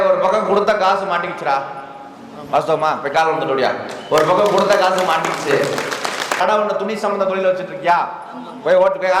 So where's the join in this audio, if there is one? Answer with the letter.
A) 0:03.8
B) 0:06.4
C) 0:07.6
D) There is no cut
B